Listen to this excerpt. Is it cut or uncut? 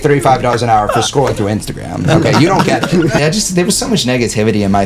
cut